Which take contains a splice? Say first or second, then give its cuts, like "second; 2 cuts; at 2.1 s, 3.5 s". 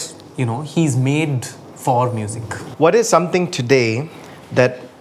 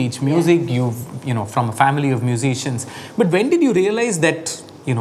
first; 1 cut; at 2.6 s